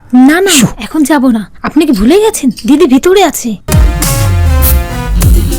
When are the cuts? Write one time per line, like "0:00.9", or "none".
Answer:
0:03.6